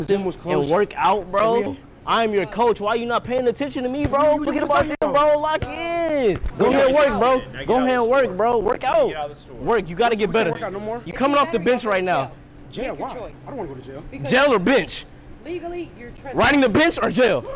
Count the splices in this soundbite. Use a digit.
2